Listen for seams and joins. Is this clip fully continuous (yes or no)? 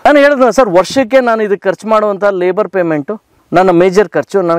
yes